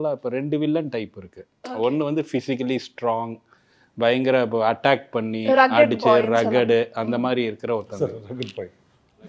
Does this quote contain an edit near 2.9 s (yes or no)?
no